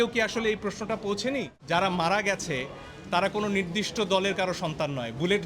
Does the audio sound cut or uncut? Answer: cut